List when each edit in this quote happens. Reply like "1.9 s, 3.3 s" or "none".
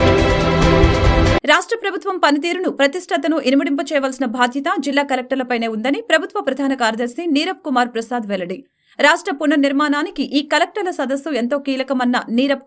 1.3 s